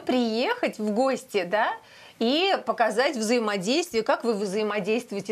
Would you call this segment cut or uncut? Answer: uncut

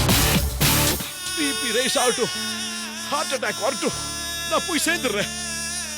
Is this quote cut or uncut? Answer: cut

